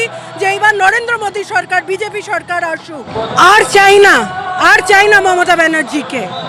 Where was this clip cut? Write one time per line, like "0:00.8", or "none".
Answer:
0:03.3